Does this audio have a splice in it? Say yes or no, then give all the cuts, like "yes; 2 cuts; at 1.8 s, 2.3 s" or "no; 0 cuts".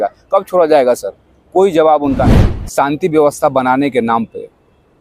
yes; 1 cut; at 2.4 s